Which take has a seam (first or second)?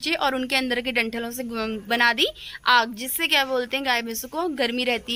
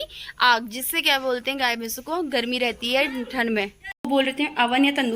second